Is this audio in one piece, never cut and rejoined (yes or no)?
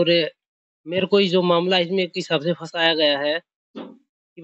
yes